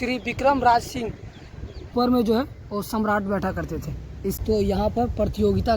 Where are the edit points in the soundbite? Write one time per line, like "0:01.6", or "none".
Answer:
0:01.9
0:04.4